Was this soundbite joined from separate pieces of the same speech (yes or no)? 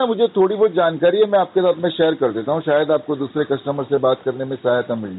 no